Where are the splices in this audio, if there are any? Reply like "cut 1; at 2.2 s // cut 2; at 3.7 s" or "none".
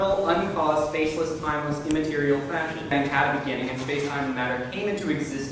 cut 1; at 2.9 s